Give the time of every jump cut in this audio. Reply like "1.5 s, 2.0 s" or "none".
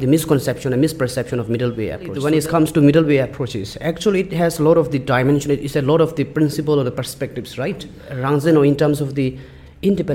2.2 s, 8.1 s